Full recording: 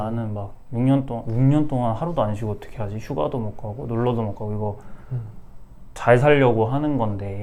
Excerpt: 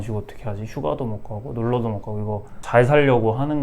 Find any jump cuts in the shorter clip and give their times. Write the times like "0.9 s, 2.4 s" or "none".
2.5 s